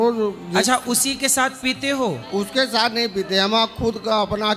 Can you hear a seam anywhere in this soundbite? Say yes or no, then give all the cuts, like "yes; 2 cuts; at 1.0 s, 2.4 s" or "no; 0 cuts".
no; 0 cuts